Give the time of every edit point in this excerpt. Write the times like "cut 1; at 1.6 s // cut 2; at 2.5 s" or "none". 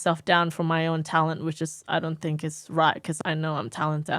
cut 1; at 3.2 s